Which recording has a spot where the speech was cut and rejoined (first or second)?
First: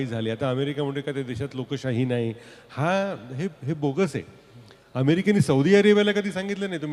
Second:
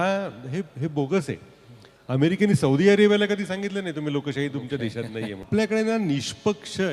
second